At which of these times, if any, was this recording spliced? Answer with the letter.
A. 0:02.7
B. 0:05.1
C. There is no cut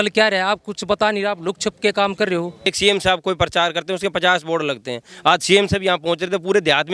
A